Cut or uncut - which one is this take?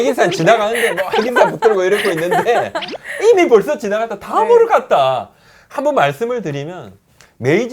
uncut